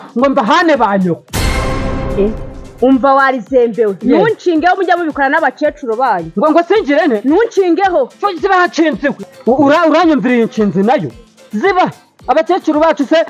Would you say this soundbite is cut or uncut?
cut